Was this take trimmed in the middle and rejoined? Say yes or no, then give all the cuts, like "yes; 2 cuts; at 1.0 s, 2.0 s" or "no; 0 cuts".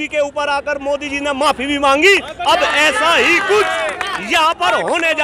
no; 0 cuts